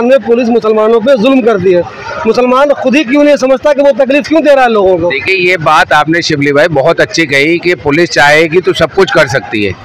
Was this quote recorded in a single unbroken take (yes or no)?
yes